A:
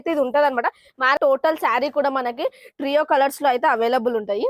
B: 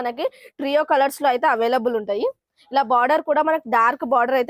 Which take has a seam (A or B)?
A